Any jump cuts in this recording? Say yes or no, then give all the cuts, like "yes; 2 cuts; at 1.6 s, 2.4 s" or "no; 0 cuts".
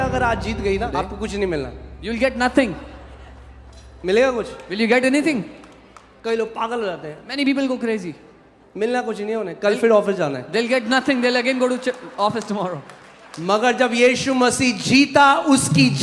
yes; 1 cut; at 0.9 s